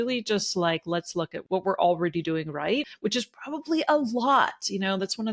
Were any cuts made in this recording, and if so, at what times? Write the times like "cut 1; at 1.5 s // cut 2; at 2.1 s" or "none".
cut 1; at 1.4 s // cut 2; at 2.9 s